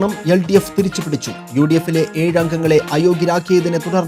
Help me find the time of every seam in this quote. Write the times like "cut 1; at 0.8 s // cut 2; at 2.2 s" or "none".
none